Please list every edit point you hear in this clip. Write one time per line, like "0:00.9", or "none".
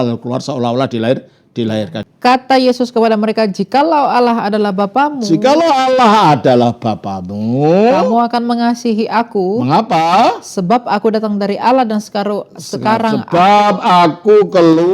0:02.0